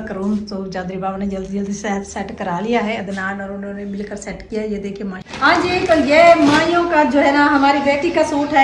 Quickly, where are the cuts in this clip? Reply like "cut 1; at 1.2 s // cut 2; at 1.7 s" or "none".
cut 1; at 5.2 s